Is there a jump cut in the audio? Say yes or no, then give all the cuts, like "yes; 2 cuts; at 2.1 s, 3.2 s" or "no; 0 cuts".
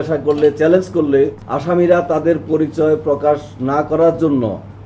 yes; 1 cut; at 1.5 s